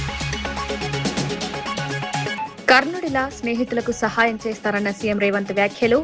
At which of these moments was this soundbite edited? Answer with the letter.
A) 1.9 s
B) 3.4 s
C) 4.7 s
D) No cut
A